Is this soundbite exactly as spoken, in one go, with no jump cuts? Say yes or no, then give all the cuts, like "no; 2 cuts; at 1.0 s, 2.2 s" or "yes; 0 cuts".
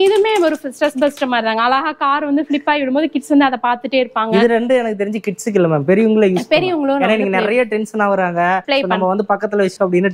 yes; 0 cuts